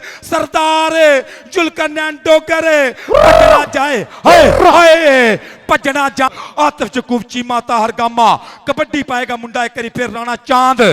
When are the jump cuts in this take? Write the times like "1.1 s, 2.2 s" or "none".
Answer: 6.3 s